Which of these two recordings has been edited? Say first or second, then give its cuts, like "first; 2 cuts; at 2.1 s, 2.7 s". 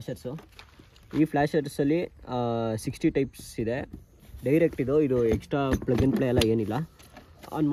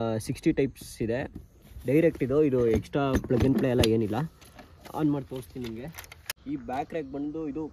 second; 1 cut; at 6.2 s